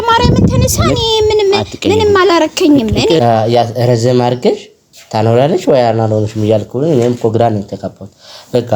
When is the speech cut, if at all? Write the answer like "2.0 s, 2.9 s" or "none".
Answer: 3.2 s